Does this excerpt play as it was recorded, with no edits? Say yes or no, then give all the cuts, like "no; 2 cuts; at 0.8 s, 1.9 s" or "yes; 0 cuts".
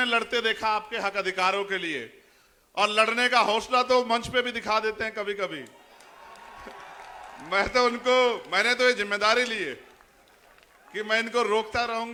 yes; 0 cuts